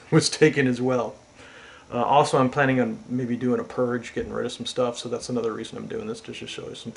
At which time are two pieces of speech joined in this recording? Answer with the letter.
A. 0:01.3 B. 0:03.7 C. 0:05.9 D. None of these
D